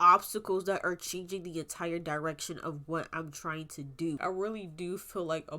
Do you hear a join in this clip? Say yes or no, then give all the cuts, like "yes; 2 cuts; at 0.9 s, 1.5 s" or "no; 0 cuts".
yes; 1 cut; at 4.2 s